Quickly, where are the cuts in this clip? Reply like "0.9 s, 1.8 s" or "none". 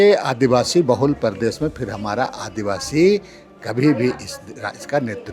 none